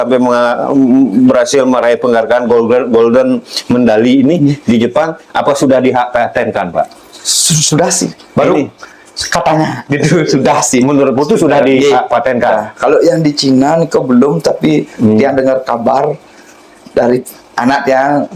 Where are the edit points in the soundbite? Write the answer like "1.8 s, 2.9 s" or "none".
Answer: none